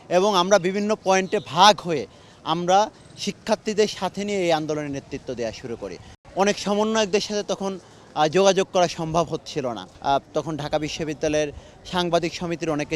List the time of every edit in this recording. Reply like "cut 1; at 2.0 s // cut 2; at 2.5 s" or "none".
cut 1; at 6.2 s // cut 2; at 9.9 s